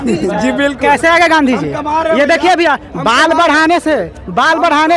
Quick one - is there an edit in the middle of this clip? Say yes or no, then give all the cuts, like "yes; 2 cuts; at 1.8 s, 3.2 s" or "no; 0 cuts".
no; 0 cuts